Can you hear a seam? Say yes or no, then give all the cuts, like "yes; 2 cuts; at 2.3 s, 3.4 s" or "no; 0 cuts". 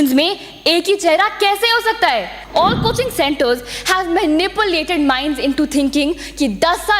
yes; 1 cut; at 2.4 s